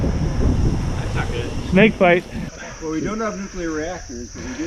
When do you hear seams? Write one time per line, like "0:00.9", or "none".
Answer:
0:02.6